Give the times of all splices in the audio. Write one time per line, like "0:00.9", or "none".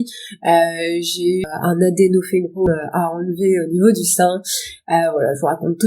0:01.4
0:02.7

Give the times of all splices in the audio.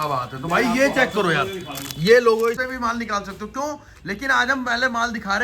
0:02.6

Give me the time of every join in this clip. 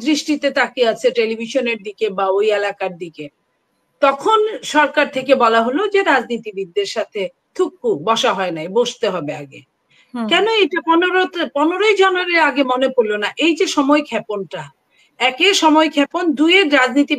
none

